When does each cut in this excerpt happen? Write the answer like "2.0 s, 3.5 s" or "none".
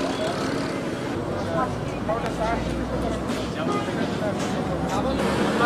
none